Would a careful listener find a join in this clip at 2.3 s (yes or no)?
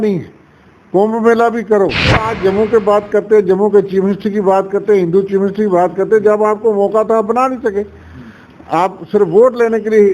yes